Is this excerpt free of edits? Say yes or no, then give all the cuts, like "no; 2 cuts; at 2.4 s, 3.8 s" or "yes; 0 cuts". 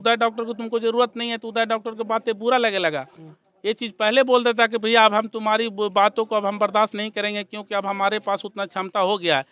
yes; 0 cuts